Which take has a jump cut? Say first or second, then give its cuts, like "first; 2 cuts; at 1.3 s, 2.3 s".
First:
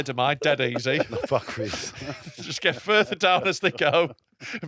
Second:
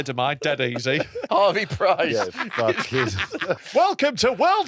second; 2 cuts; at 1.3 s, 3.6 s